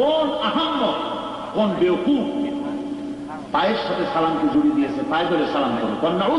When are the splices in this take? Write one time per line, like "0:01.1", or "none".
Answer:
none